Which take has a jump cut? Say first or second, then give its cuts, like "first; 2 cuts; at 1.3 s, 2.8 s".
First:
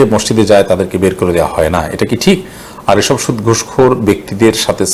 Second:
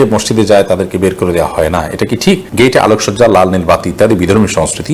second; 1 cut; at 2.5 s